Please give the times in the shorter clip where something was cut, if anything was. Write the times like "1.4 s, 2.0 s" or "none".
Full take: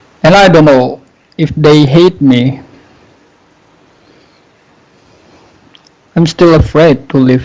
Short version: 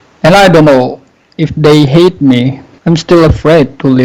2.7 s